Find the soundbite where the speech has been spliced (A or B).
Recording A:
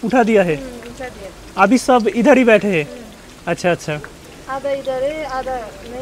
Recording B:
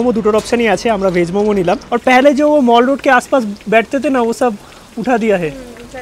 B